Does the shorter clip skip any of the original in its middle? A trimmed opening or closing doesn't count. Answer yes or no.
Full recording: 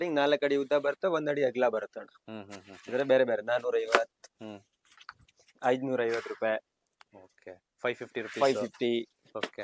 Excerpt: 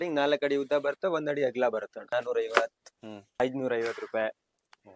yes